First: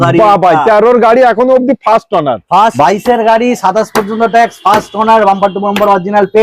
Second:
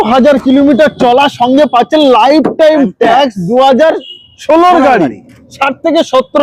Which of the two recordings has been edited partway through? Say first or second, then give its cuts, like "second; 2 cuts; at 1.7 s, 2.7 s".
first; 1 cut; at 2.7 s